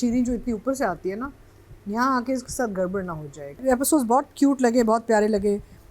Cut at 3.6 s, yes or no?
yes